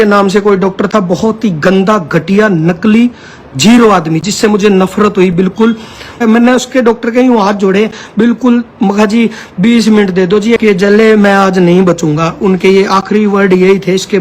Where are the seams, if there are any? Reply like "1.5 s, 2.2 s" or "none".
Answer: 6.1 s, 10.6 s